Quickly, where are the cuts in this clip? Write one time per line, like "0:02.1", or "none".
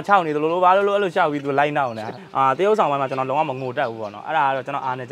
0:02.1